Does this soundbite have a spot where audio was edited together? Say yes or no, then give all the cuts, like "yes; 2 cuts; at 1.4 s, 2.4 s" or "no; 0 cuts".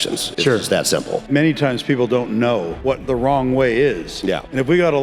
yes; 2 cuts; at 1.2 s, 2.7 s